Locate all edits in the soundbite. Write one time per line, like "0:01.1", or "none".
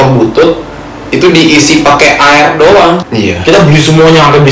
0:03.0